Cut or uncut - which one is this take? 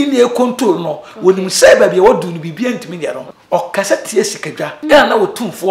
cut